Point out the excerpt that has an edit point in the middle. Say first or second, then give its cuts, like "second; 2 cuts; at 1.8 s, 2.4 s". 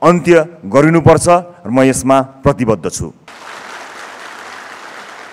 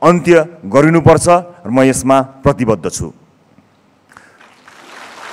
first; 1 cut; at 3.3 s